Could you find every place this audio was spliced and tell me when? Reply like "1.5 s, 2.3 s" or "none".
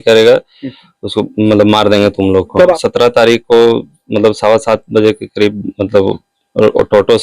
2.8 s